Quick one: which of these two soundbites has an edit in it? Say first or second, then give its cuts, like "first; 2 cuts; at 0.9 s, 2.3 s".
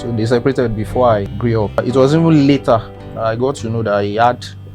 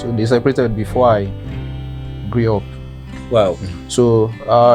first; 1 cut; at 1.8 s